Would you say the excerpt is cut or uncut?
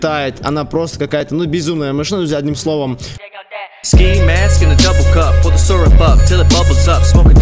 uncut